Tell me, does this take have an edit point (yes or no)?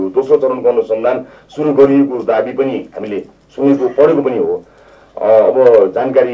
no